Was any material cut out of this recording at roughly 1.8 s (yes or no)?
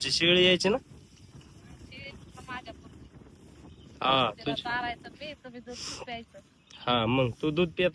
no